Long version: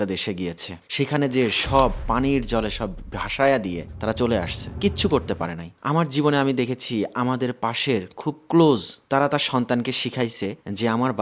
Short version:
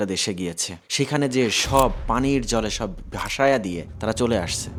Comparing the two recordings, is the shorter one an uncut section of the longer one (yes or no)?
yes